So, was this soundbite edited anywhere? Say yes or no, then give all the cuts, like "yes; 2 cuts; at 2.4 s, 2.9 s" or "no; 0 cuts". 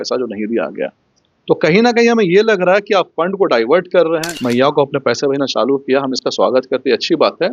yes; 1 cut; at 4.3 s